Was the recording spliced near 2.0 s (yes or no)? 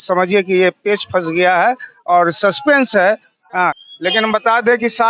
no